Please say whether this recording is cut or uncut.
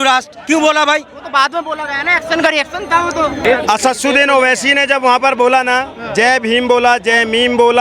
cut